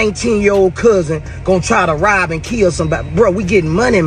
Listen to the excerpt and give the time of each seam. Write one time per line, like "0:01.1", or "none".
none